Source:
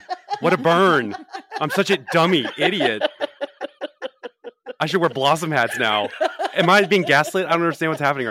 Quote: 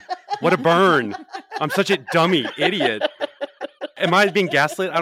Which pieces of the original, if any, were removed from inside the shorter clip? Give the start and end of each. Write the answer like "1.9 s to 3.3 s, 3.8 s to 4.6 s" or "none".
4.0 s to 6.5 s

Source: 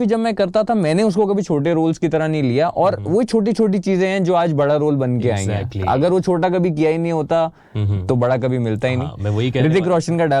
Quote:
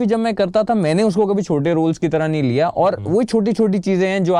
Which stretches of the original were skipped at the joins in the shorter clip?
none

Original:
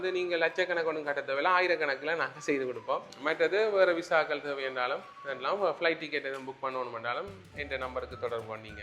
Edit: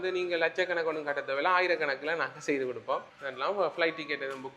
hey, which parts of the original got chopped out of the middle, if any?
3.1 s to 5.1 s

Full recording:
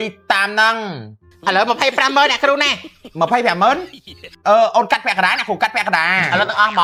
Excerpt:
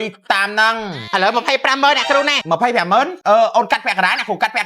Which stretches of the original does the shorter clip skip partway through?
0.9 s to 1.3 s, 3.0 s to 3.9 s

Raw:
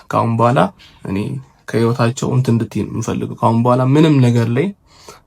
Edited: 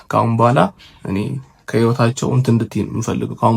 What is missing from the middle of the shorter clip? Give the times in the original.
none

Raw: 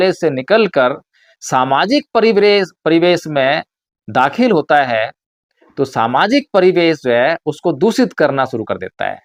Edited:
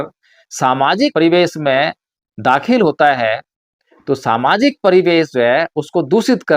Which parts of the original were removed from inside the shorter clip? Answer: 2.0 s to 2.8 s

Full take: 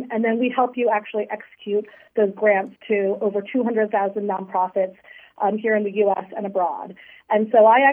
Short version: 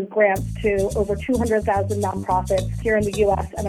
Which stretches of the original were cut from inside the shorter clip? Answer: 5.1 s to 5.6 s

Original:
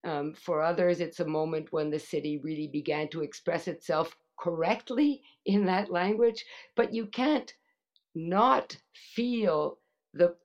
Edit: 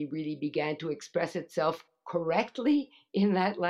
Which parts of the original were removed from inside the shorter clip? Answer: none

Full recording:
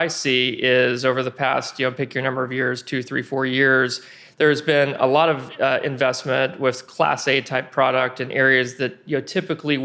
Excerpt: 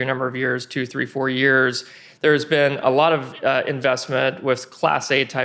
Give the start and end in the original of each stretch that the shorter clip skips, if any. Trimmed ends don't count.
none

